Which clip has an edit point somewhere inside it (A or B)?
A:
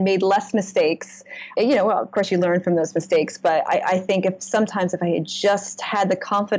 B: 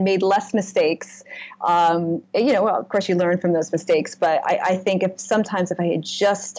A